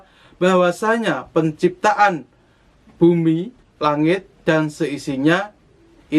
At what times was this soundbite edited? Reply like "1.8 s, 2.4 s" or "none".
3.6 s